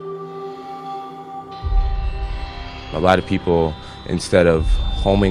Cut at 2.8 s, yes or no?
yes